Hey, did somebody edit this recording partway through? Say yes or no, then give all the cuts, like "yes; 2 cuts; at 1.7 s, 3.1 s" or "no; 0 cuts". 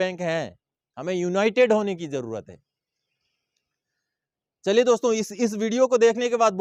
no; 0 cuts